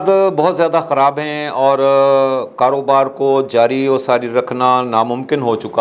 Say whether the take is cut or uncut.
uncut